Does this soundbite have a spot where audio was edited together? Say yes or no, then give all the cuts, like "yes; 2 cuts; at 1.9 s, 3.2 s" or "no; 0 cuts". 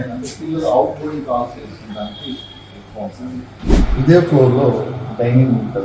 yes; 1 cut; at 3.6 s